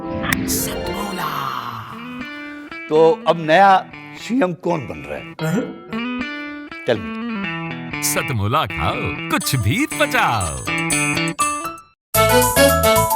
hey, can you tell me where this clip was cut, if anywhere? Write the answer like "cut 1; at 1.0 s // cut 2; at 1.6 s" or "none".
cut 1; at 12.0 s